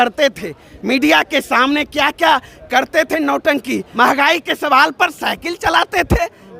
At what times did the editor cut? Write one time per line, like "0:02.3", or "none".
0:03.9